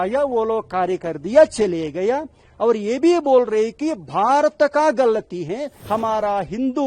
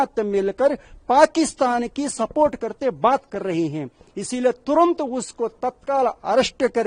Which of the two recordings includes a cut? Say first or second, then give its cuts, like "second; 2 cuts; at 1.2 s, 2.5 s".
first; 1 cut; at 5.7 s